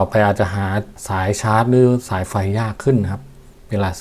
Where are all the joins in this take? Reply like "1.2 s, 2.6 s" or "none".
1.0 s